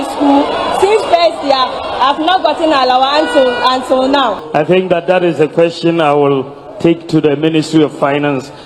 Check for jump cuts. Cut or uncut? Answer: cut